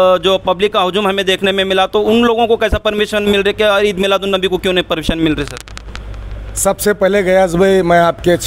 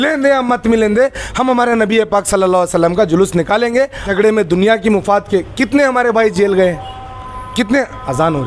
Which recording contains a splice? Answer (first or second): second